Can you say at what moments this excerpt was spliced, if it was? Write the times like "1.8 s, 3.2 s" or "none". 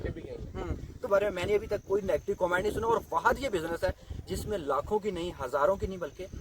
1.1 s